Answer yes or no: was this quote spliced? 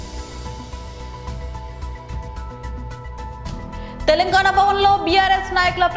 no